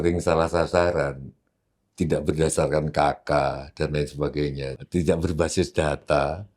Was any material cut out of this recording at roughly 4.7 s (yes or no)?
yes